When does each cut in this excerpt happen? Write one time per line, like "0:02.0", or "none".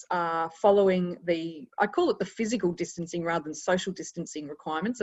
0:01.6